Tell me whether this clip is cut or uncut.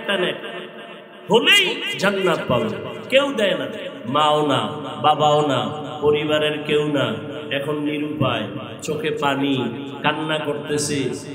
uncut